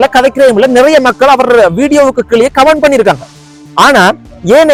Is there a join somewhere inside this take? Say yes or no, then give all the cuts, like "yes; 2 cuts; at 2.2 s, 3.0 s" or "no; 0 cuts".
no; 0 cuts